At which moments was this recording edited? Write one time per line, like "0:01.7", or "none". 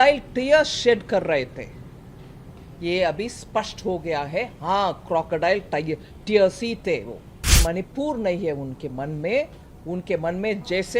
0:07.6